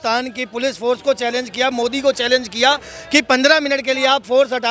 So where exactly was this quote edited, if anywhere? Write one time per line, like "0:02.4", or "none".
none